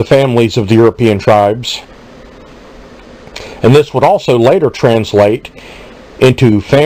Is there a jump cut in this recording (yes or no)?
yes